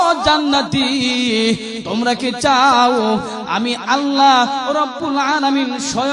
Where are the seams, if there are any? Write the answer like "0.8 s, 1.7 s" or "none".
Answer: none